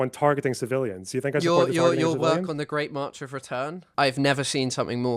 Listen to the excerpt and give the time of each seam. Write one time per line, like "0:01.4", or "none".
0:03.8